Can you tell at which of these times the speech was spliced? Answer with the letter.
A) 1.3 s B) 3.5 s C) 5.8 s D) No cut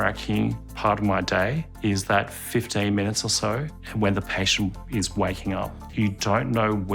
C